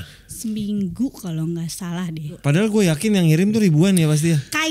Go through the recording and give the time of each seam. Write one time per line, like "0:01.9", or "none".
0:02.4